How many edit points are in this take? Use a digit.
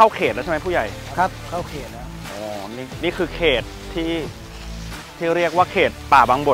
0